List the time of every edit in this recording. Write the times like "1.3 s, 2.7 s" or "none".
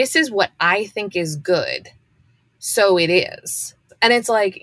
3.7 s